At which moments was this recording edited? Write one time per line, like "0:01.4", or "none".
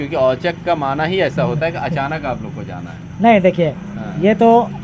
none

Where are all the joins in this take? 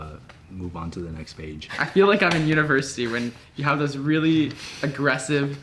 0:01.6

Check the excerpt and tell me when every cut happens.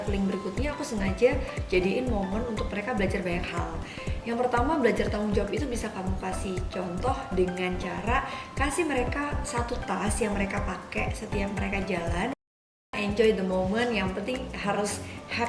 0:12.7

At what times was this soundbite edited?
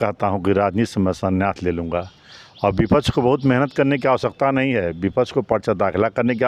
none

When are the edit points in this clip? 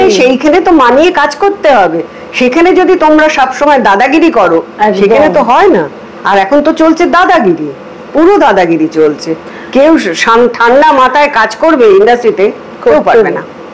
none

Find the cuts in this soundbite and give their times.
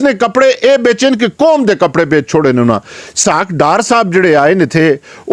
0:03.2

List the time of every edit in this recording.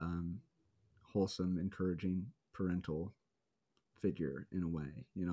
none

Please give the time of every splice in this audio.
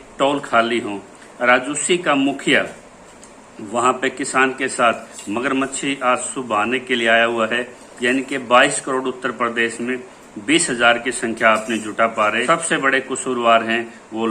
0:07.8
0:12.4

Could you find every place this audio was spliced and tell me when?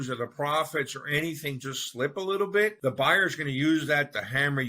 0:02.8

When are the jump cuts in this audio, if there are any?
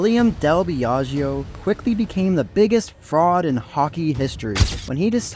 0:01.5
0:02.5

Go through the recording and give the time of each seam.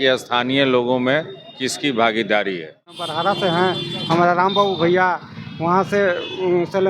0:03.1

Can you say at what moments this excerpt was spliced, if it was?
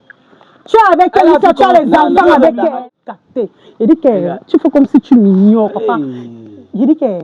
0:02.8

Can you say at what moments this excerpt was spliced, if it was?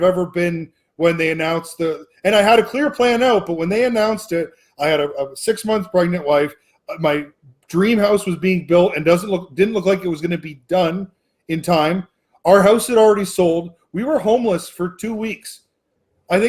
none

